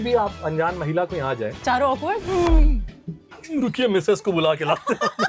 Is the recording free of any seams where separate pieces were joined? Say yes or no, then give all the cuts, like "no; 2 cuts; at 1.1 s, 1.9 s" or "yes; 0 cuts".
yes; 0 cuts